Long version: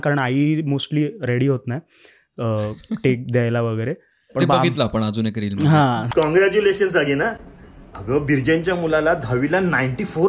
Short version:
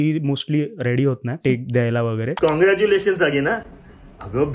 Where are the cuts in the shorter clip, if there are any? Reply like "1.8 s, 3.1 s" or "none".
1.4 s, 2.3 s